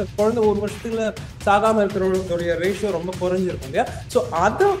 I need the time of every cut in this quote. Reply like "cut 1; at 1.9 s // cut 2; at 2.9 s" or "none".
none